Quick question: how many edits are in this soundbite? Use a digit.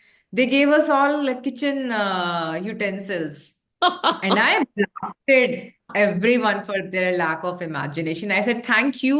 0